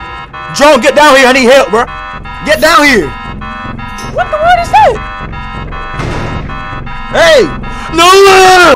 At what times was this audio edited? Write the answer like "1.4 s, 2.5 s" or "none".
none